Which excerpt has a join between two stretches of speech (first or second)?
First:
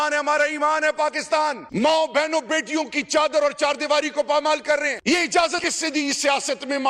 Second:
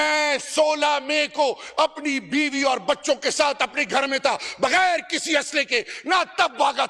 first